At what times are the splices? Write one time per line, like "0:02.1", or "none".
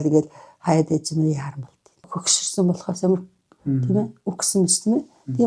0:01.9